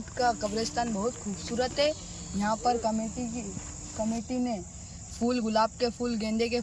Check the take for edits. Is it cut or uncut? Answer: uncut